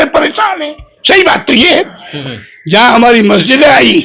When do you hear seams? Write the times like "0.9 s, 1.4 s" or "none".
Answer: 2.1 s

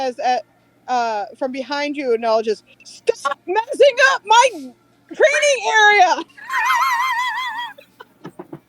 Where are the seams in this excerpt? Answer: 6.4 s

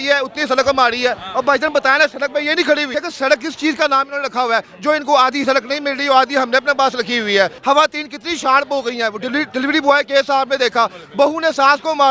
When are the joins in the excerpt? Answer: 2.9 s, 7.6 s

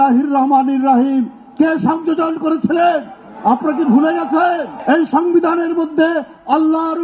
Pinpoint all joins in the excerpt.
4.7 s

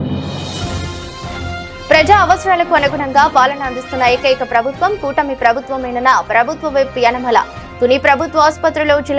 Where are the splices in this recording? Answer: 1.7 s

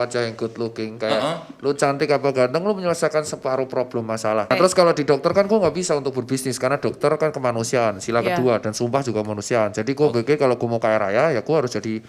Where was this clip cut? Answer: 4.5 s

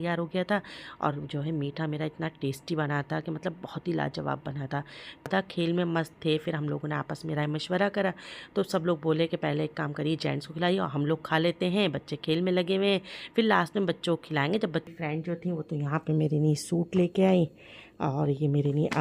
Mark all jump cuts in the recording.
5.3 s, 14.9 s

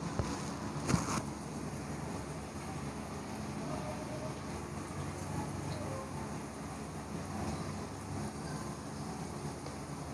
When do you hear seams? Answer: 4.5 s

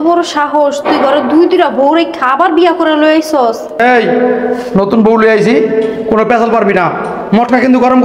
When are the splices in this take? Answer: 3.8 s

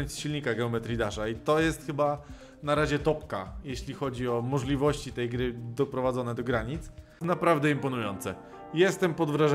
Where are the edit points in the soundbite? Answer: 7.2 s

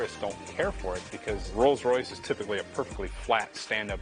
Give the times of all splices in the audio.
none

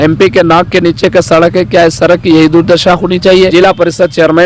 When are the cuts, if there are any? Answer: 3.5 s

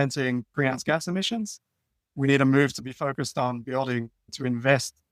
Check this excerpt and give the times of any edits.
4.2 s

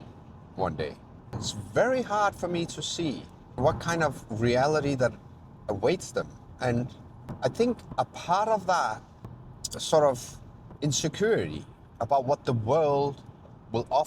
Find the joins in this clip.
9.1 s

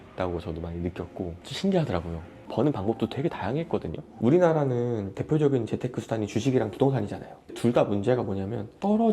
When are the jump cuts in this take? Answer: 2.4 s, 4.0 s

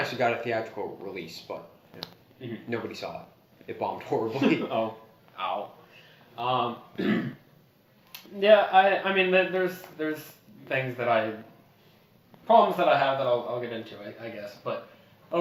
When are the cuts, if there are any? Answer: none

